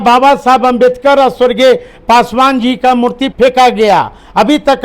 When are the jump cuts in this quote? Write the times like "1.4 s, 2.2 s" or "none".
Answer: 3.3 s